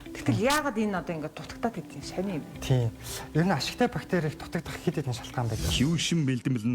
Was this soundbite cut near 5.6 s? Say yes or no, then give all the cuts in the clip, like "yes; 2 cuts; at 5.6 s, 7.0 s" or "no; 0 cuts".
yes; 1 cut; at 5.6 s